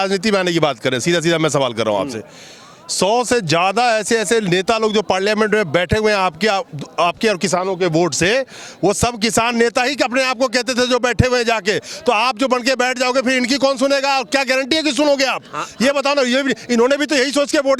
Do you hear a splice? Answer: no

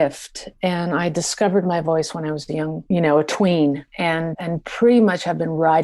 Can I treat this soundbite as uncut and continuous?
no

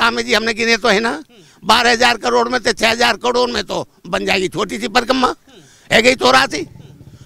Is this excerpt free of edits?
yes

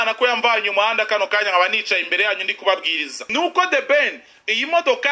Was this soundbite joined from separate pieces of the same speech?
yes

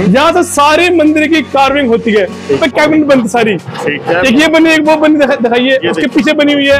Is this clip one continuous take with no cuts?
no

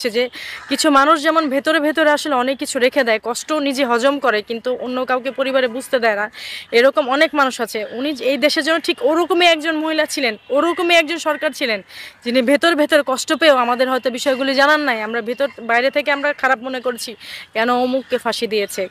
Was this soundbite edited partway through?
no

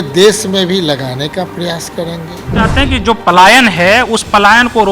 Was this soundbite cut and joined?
yes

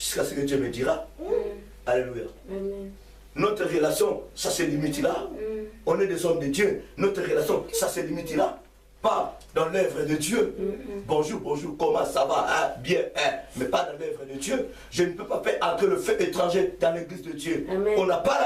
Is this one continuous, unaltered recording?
yes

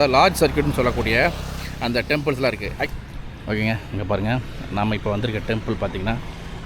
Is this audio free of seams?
no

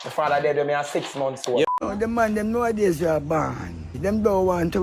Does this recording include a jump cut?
yes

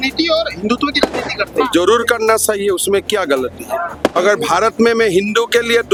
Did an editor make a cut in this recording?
no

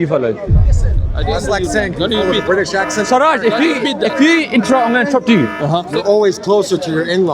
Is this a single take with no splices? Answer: no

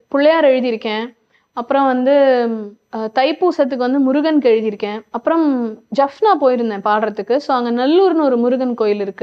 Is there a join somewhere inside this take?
no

